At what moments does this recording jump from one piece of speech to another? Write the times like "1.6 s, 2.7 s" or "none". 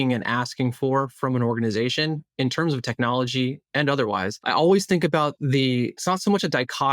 4.4 s, 6.0 s